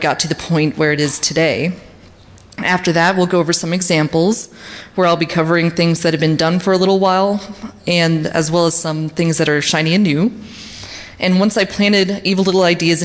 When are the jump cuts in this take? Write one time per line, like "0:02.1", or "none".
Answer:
none

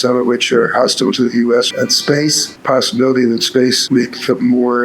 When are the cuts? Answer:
0:02.0
0:03.8

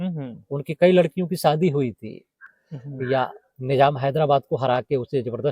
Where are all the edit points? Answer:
0:02.5

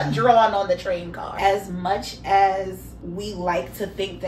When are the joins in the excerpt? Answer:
0:01.2
0:02.9

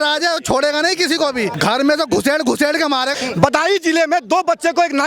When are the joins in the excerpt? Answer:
0:01.5
0:03.2

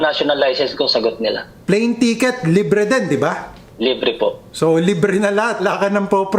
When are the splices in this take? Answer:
0:01.5
0:04.1
0:05.6

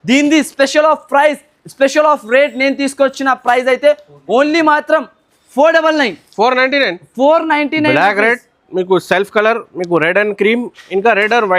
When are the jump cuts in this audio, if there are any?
none

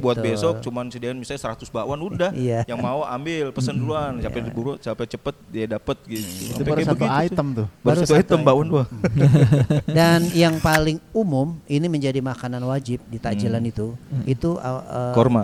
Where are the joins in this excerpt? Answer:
none

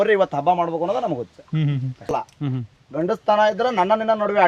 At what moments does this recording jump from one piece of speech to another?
0:01.9

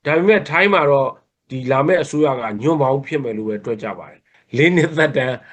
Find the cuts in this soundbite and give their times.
0:04.3

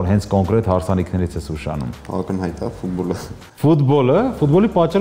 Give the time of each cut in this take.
0:02.0

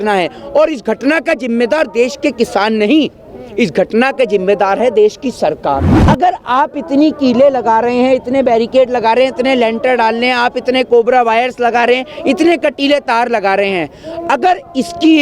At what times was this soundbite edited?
0:05.9

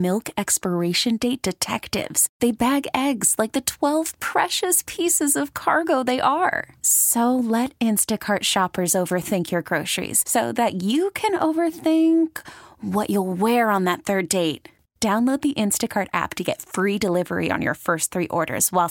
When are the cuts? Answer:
none

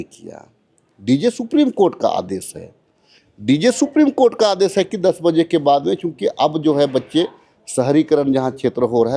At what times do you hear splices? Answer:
none

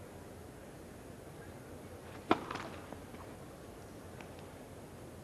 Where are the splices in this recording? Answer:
0:03.6

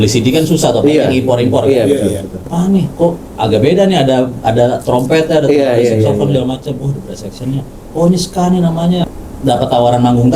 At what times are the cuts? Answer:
0:02.4
0:09.1

